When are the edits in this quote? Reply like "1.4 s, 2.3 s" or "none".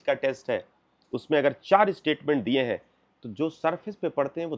none